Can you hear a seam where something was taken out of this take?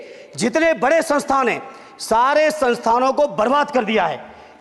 no; 0 cuts

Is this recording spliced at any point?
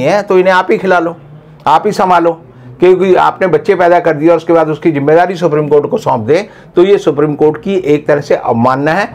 no; 0 cuts

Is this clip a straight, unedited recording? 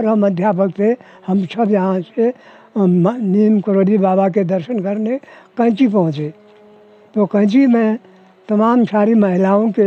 yes; 0 cuts

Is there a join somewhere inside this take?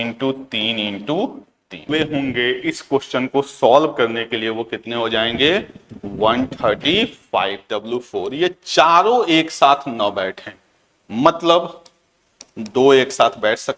yes; 2 cuts; at 1.9 s, 7.6 s

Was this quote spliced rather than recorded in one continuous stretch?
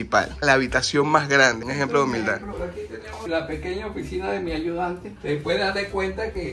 yes; 1 cut; at 2.5 s

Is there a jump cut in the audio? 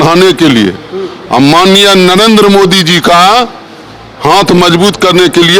no; 0 cuts

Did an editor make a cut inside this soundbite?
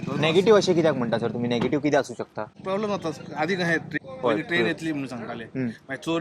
yes; 2 cuts; at 2.5 s, 3.9 s

